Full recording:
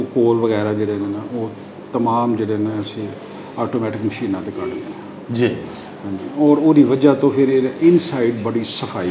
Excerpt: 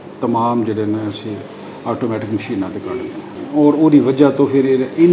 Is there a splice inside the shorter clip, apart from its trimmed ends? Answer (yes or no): yes